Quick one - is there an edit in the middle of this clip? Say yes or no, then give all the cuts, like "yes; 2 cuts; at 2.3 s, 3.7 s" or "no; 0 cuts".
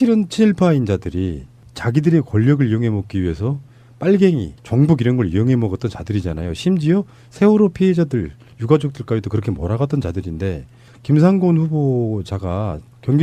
yes; 1 cut; at 4.9 s